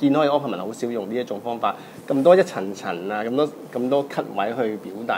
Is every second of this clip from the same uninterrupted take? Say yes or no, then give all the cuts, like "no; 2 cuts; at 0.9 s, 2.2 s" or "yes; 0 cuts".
yes; 0 cuts